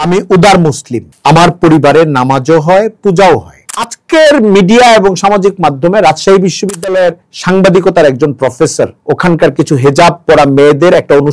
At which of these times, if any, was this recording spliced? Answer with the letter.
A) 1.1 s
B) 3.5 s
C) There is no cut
B